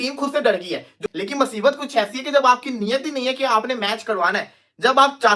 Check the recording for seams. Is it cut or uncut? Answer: cut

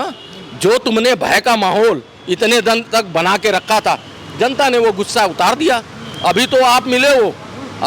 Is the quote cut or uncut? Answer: uncut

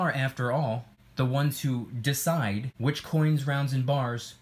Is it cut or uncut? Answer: cut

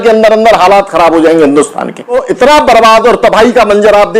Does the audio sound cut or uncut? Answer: cut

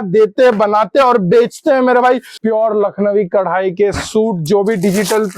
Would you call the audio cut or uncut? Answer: cut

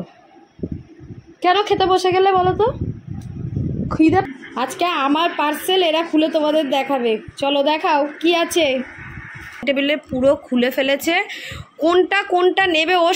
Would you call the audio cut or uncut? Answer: cut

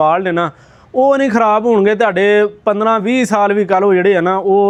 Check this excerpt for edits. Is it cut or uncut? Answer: uncut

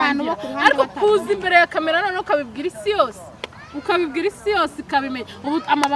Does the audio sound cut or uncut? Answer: uncut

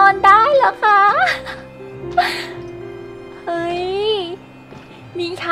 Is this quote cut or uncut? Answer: uncut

